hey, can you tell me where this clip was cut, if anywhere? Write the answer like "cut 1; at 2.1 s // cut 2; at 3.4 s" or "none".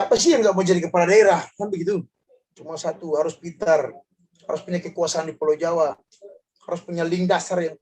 cut 1; at 2.2 s